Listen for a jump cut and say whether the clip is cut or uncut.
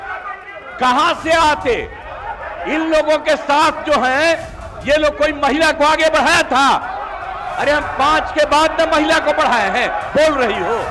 uncut